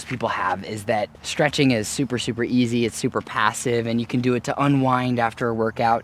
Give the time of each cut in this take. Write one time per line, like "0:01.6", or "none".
0:01.1